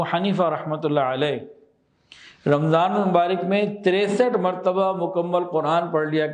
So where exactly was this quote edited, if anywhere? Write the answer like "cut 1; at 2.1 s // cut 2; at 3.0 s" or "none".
none